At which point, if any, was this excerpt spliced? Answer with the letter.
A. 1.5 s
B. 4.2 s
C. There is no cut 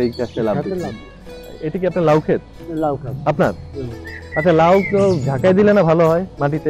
A